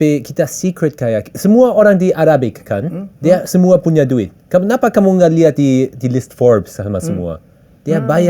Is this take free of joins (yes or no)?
yes